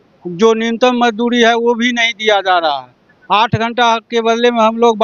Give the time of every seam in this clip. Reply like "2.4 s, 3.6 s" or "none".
none

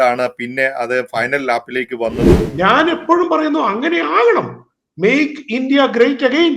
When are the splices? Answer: 2.5 s

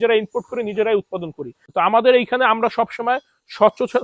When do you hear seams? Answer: 1.7 s

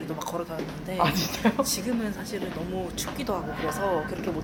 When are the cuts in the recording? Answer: none

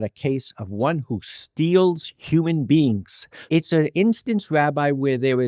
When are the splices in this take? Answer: 3.4 s

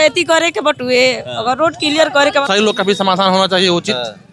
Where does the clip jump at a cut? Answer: 2.5 s

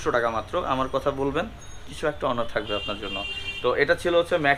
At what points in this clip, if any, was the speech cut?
none

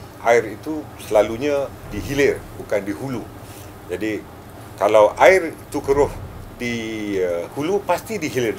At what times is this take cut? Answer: 1.9 s

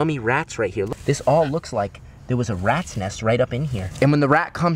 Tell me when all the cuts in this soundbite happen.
0.9 s, 3.8 s

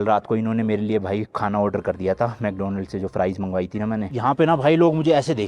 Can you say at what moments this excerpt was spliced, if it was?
4.1 s

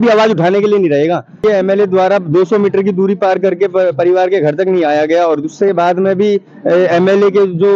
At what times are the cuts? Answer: 1.4 s

